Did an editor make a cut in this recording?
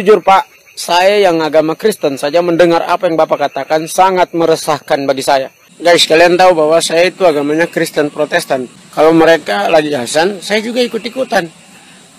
yes; 1 cut; at 5.6 s

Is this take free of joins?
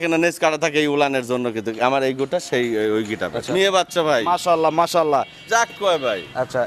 no; 1 cut; at 3.5 s

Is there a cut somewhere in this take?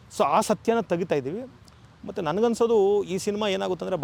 no; 0 cuts

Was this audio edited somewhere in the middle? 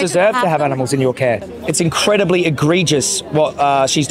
yes; 1 cut; at 1.5 s

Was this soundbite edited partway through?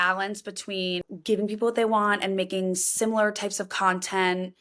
yes; 1 cut; at 1.0 s

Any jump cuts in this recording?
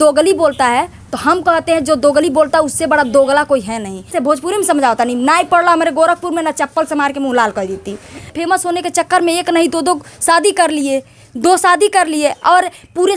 yes; 2 cuts; at 4.1 s, 8.3 s

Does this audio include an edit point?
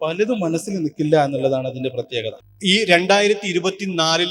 yes; 1 cut; at 2.4 s

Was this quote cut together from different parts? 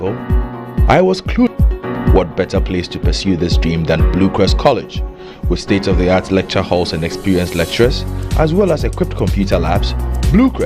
yes; 1 cut; at 1.5 s

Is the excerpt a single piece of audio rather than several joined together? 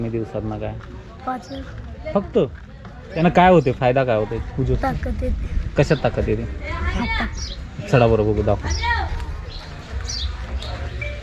no; 1 cut; at 3.2 s

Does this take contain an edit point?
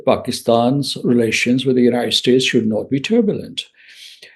no; 0 cuts

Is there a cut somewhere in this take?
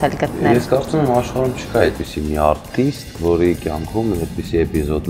no; 0 cuts

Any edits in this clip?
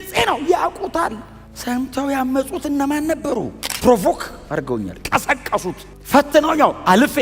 yes; 1 cut; at 3.6 s

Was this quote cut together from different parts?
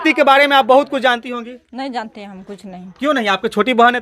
no; 0 cuts

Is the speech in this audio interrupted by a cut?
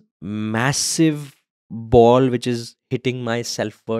no; 0 cuts

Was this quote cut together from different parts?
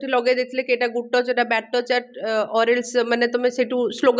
no; 0 cuts

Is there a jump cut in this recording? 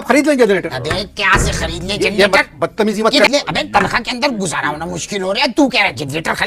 yes; 1 cut; at 3.3 s

